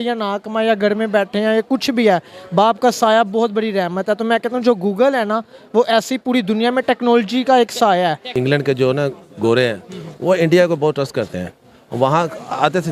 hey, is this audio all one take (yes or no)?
no